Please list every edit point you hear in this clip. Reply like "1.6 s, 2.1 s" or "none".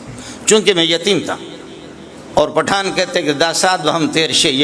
2.1 s